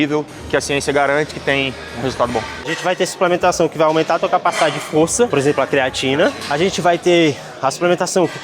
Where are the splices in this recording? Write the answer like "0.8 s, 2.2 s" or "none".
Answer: 2.7 s, 5.3 s, 6.4 s